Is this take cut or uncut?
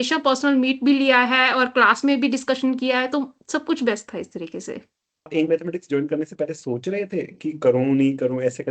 cut